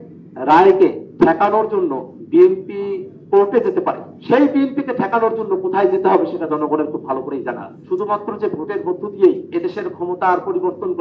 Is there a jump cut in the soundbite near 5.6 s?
no; 6 cuts; at 1.0 s, 2.1 s, 3.1 s, 4.1 s, 7.7 s, 9.4 s

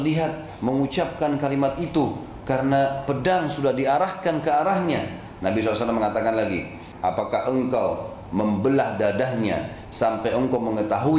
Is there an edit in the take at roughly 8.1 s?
no; 1 cut; at 6.9 s

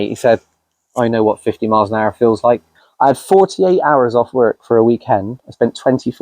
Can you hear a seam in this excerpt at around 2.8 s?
yes; 1 cut; at 2.8 s

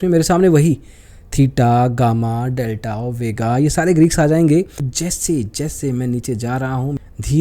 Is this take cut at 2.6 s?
no; 1 cut; at 4.8 s

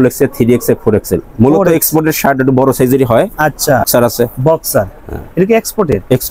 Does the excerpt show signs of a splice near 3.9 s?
yes; 1 cut; at 3.9 s

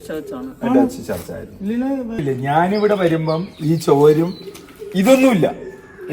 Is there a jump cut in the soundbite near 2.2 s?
yes; 1 cut; at 2.2 s

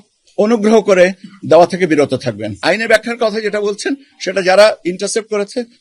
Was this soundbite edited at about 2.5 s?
yes; 1 cut; at 2.5 s

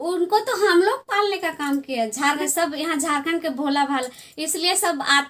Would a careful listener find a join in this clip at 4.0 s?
no; 1 cut; at 2.4 s

